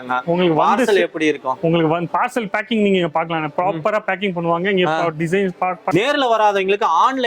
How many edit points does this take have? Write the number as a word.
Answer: one